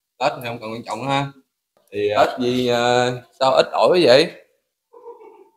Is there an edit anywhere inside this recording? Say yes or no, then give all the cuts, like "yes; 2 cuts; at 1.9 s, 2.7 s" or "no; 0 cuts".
yes; 1 cut; at 2.1 s